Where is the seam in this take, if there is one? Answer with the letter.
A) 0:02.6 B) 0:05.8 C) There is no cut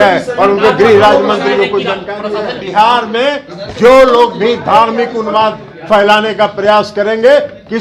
A